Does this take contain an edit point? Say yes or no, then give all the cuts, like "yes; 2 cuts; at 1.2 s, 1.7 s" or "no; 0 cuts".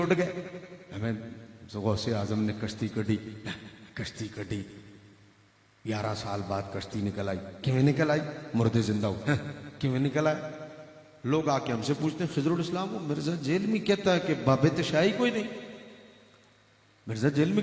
no; 0 cuts